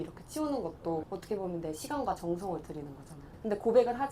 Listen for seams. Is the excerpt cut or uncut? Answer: cut